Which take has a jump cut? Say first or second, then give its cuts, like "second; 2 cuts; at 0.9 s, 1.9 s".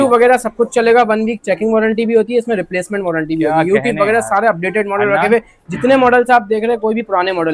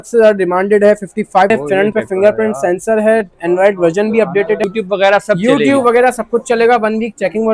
second; 2 cuts; at 1.5 s, 4.6 s